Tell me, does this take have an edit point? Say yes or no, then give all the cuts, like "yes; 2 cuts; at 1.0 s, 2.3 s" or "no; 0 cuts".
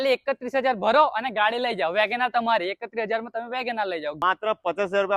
yes; 1 cut; at 4.2 s